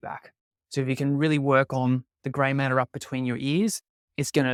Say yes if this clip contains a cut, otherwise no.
no